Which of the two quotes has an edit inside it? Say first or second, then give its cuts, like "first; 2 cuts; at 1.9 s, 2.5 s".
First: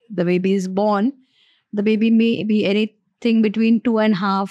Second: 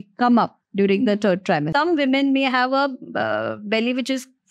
second; 1 cut; at 1.7 s